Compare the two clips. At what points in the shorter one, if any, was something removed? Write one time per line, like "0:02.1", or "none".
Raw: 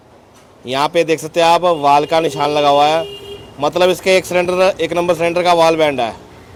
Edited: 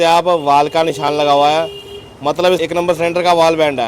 0:02.6

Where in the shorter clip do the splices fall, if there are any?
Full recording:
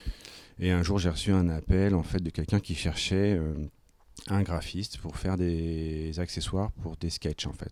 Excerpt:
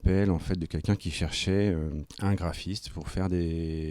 0:02.1

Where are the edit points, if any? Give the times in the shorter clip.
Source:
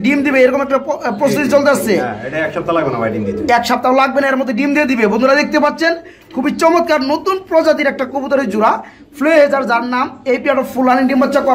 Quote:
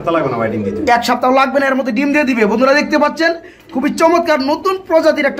none

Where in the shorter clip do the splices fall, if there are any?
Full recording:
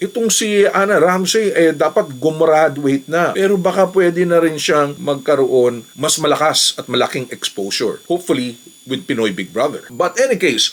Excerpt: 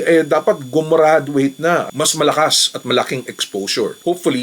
0:01.8

